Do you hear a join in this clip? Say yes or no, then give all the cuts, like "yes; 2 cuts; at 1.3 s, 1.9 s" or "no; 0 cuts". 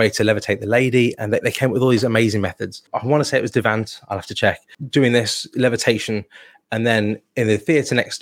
yes; 2 cuts; at 2.8 s, 4.7 s